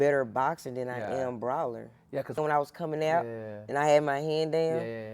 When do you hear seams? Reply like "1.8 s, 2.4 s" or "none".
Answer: 2.4 s